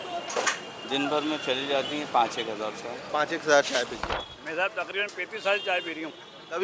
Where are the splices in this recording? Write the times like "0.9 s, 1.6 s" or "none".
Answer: 4.2 s